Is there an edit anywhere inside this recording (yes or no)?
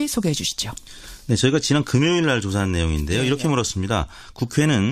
no